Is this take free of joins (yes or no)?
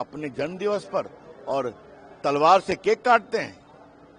yes